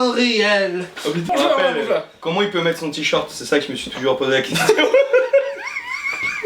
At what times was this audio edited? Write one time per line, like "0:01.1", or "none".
0:01.3